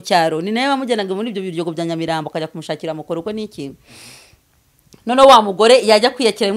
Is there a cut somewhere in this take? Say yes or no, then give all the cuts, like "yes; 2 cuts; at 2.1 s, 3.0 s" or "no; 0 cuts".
no; 0 cuts